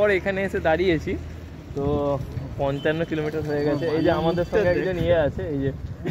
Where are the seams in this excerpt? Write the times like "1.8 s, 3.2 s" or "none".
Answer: none